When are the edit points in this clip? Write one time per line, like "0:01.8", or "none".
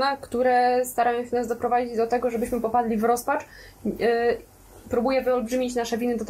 none